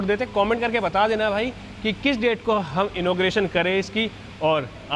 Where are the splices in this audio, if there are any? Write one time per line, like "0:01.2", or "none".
none